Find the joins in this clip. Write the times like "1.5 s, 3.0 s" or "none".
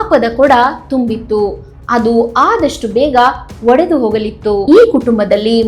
4.6 s